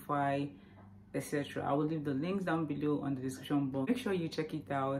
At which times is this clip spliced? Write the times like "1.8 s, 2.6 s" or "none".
3.9 s